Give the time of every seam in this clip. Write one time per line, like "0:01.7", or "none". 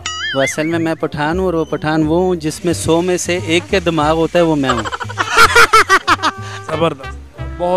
0:06.6